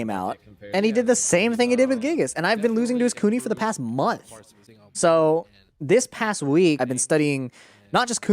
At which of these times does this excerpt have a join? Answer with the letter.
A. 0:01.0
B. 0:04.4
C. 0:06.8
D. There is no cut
C